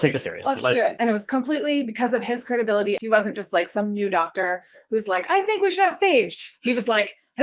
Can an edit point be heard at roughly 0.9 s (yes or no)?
yes